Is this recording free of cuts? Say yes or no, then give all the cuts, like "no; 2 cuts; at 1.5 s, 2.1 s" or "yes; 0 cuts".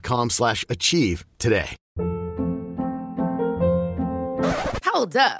no; 1 cut; at 1.8 s